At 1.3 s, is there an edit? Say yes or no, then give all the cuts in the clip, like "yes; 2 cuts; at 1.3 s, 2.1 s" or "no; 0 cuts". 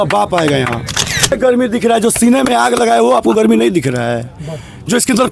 yes; 1 cut; at 1.3 s